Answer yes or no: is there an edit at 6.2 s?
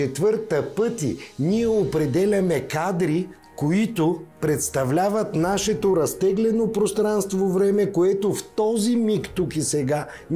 no